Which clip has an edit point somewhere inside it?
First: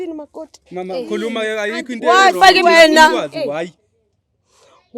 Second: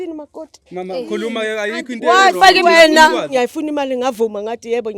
second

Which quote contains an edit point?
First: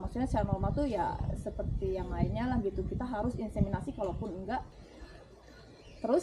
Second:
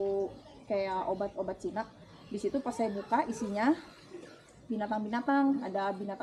first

